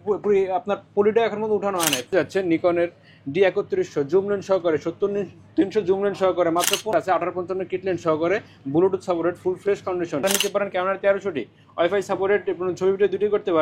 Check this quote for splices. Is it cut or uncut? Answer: cut